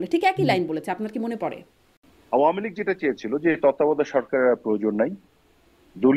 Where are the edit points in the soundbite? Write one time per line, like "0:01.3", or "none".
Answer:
0:02.1